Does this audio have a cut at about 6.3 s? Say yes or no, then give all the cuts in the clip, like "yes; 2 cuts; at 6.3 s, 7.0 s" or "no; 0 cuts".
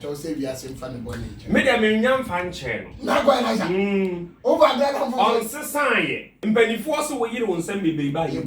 yes; 1 cut; at 6.3 s